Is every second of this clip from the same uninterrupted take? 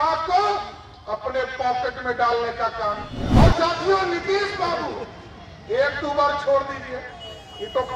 no; 1 cut; at 3.1 s

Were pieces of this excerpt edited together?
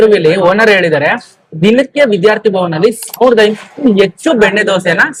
no; 0 cuts

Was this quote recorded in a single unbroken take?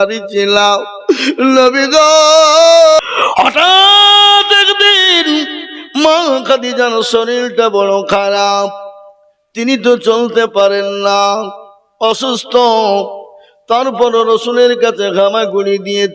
no; 1 cut; at 3.0 s

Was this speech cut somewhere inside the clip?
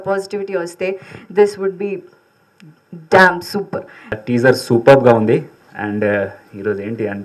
yes; 1 cut; at 4.2 s

